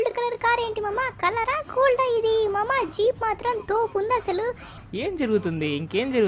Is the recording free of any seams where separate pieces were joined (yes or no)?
no